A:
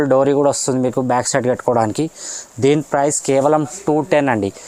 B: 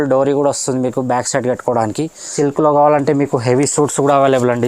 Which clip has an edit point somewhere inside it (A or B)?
B